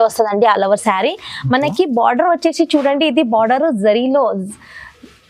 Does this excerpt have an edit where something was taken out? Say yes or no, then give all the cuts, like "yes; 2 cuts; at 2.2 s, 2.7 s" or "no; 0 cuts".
no; 0 cuts